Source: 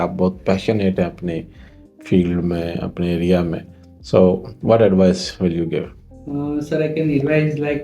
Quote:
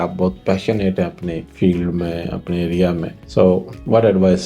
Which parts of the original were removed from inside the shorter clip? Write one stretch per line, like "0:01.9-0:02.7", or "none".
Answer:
0:01.5-0:02.0
0:03.7-0:03.9